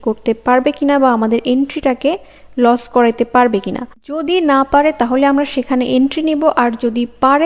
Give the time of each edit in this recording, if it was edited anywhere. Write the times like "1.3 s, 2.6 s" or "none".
none